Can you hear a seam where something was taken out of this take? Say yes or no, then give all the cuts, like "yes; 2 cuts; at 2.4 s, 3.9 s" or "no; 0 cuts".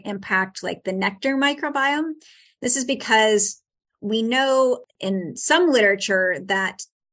yes; 1 cut; at 4.9 s